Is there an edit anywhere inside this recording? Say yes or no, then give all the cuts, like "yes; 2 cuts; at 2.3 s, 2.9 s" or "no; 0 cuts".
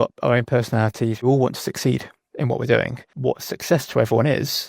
yes; 2 cuts; at 1.2 s, 3.1 s